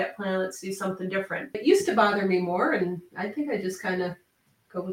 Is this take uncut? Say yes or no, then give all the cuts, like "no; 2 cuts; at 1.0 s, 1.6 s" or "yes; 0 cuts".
no; 1 cut; at 1.6 s